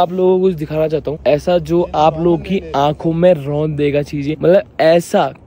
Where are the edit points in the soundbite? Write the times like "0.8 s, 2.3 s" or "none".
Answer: 1.2 s, 4.3 s